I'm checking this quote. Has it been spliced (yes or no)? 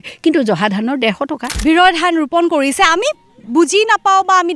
yes